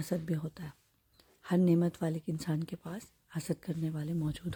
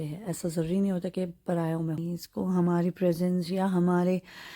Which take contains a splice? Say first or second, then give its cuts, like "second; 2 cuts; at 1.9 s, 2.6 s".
second; 1 cut; at 2.0 s